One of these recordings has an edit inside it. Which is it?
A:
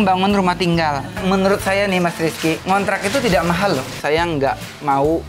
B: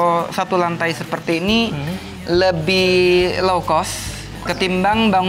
A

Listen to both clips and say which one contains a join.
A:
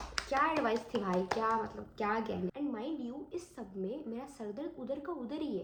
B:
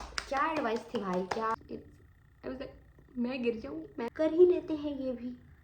B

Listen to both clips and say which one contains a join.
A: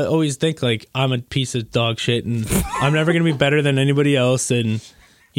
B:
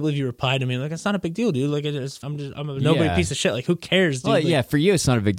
B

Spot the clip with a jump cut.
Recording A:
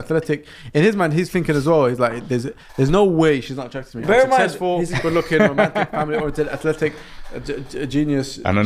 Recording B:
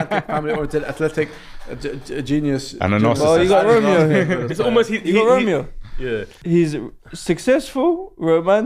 B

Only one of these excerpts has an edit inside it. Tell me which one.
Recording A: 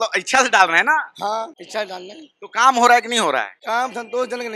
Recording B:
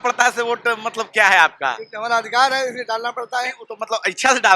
A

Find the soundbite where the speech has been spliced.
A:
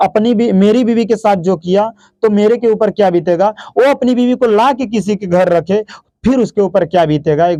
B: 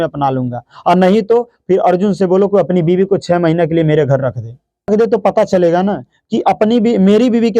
B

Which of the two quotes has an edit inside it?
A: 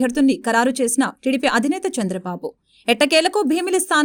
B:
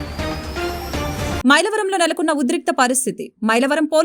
B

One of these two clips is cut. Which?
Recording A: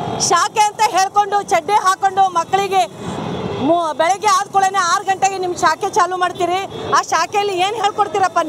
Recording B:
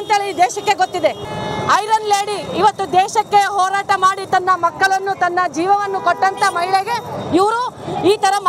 B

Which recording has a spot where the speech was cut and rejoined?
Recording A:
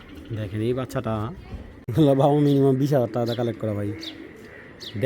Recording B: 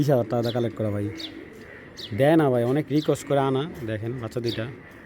A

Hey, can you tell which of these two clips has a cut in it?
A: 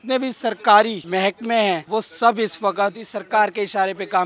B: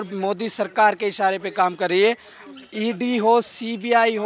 A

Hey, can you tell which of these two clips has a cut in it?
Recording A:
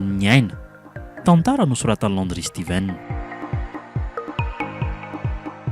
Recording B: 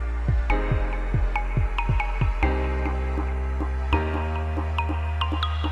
A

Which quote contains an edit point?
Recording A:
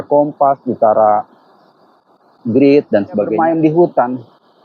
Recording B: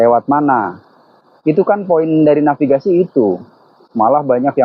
A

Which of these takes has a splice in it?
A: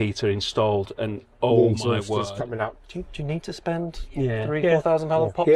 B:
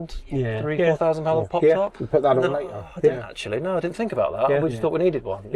A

